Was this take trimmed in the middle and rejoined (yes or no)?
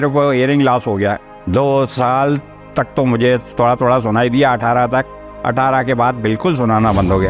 no